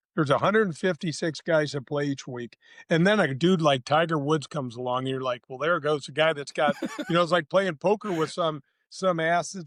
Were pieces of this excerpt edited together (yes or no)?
no